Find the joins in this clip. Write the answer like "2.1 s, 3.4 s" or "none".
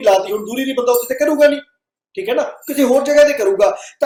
none